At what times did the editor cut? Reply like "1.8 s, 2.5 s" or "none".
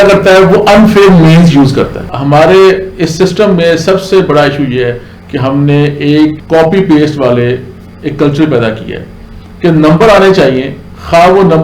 2.1 s, 6.4 s